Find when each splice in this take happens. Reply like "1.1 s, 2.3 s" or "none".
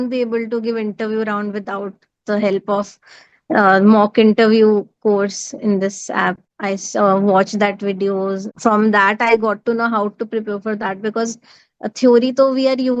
6.5 s, 8.5 s